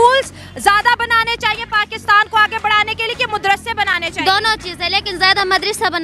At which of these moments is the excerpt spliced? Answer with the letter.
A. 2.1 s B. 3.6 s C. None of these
C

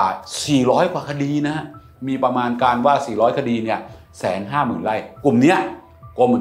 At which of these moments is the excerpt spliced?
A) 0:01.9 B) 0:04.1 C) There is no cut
A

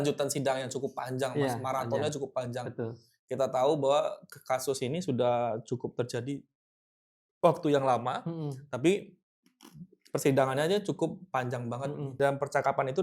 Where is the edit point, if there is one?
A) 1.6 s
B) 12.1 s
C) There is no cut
B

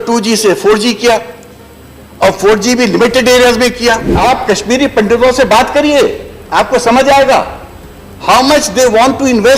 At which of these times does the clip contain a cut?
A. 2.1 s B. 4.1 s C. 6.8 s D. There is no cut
B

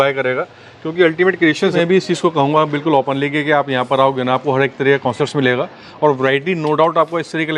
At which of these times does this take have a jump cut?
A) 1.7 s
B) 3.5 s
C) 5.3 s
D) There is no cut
A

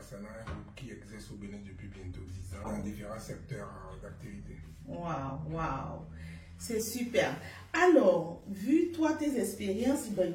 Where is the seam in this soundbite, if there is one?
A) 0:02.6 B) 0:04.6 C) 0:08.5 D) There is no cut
A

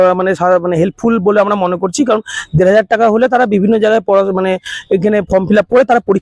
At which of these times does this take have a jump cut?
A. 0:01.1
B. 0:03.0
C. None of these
C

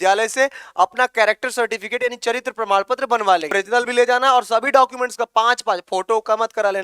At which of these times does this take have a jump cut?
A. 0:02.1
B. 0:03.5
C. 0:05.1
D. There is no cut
B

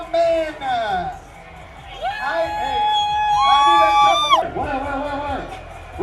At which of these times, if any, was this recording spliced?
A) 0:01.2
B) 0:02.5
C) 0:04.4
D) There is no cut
C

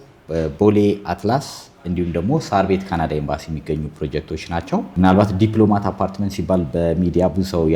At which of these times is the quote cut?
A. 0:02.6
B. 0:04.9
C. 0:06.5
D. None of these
B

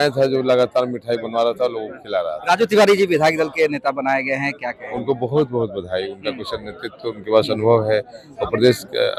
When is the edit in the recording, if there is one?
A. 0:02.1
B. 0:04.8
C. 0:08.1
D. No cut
D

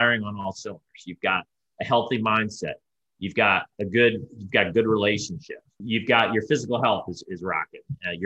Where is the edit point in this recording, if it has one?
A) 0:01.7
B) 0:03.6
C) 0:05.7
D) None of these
C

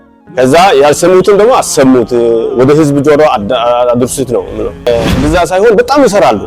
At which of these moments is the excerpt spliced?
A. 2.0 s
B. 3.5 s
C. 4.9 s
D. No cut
C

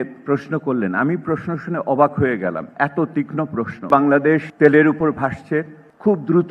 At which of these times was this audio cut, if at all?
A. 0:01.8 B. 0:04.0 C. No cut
B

